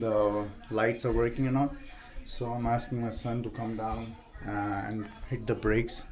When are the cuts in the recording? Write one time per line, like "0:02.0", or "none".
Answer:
none